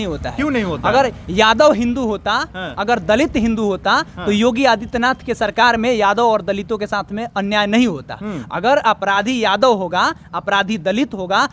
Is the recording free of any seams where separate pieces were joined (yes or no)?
yes